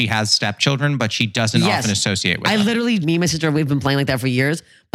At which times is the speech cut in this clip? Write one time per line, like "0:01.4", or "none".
0:03.0